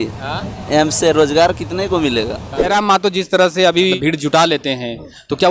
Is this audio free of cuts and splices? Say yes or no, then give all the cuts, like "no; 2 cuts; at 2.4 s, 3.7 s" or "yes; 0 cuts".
no; 2 cuts; at 2.7 s, 4.0 s